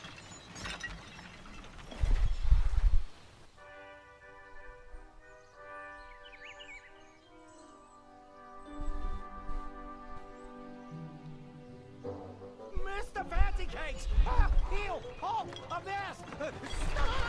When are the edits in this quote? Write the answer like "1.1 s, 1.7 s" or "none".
9.9 s